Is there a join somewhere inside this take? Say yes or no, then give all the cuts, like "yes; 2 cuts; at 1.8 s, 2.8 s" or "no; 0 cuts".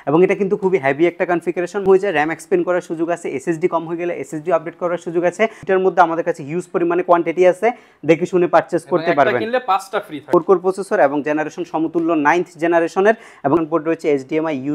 yes; 4 cuts; at 1.8 s, 5.6 s, 10.3 s, 13.6 s